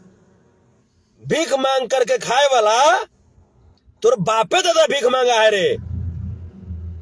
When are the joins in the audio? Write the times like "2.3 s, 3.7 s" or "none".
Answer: none